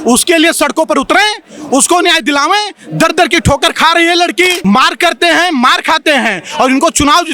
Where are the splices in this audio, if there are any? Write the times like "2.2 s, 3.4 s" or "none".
4.6 s